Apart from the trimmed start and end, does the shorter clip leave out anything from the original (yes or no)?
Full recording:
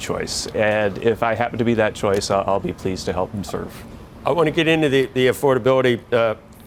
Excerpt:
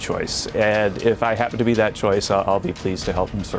no